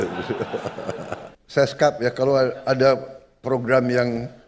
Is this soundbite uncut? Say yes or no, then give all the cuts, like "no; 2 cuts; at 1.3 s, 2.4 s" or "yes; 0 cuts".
no; 1 cut; at 1.3 s